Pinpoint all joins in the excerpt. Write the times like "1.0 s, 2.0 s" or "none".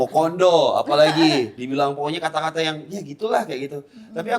1.5 s